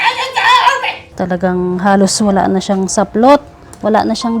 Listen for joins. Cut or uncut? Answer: cut